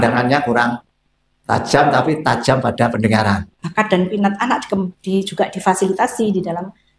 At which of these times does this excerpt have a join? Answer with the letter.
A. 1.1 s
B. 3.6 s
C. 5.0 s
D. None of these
B